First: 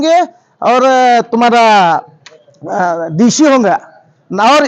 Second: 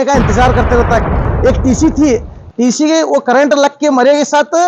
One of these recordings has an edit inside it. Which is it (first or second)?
second